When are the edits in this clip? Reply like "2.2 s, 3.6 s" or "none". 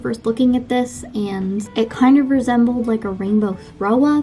1.7 s